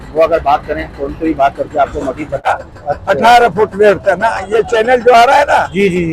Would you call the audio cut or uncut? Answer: cut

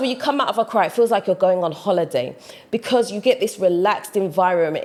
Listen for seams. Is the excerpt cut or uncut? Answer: uncut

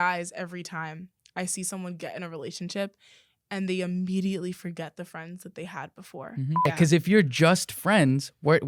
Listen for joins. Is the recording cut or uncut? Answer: cut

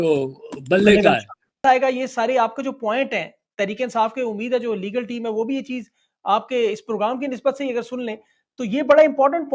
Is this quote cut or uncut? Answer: cut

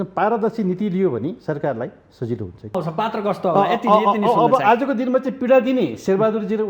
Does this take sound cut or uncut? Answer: cut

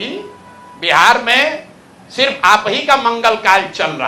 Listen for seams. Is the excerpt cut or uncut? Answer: uncut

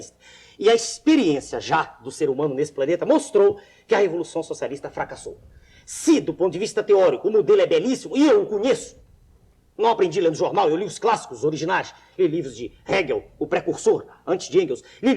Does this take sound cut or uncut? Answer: cut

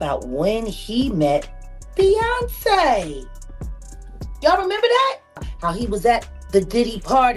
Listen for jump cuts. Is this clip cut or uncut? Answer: cut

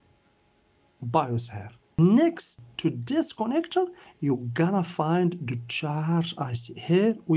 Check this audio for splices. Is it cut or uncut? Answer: cut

